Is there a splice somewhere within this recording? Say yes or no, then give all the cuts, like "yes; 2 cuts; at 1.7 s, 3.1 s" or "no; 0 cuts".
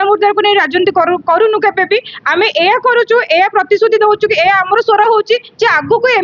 no; 0 cuts